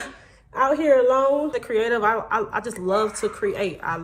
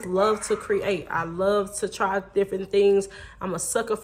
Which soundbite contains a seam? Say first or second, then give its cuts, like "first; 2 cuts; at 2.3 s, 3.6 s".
first; 1 cut; at 1.6 s